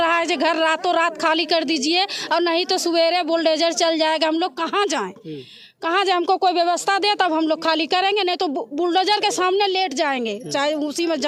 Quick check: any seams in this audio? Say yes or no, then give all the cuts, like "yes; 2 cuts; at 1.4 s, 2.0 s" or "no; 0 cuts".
no; 0 cuts